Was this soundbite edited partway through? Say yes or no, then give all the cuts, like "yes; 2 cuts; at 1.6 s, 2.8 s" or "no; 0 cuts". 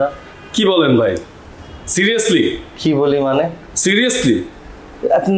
no; 0 cuts